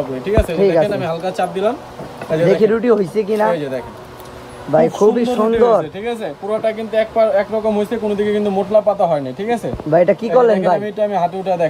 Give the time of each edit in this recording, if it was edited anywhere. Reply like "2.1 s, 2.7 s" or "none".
none